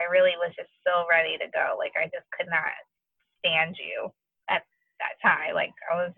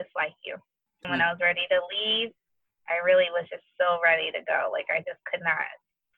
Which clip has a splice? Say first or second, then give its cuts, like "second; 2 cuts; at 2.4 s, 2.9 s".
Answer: second; 1 cut; at 1.0 s